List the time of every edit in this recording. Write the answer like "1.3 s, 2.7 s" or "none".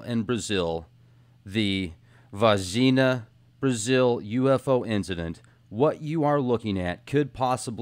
none